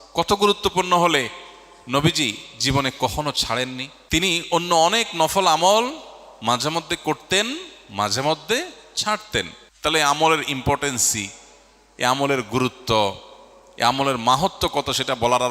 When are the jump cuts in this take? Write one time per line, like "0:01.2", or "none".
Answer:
0:03.9
0:09.6